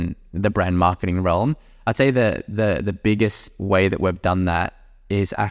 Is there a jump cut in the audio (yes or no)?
no